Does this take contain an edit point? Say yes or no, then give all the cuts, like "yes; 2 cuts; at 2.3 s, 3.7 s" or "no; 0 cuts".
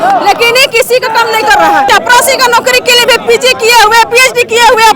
yes; 1 cut; at 1.7 s